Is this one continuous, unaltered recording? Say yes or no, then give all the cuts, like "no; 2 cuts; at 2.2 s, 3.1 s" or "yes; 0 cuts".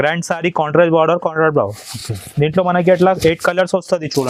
yes; 0 cuts